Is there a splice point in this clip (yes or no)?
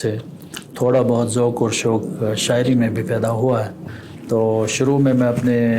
yes